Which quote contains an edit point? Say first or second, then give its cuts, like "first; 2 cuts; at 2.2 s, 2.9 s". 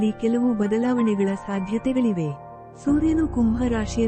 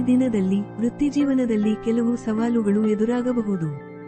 second; 1 cut; at 1.8 s